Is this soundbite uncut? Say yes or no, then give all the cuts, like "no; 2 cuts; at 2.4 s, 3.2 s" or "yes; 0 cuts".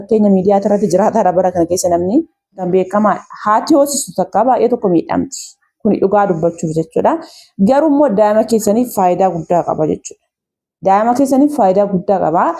no; 1 cut; at 2.6 s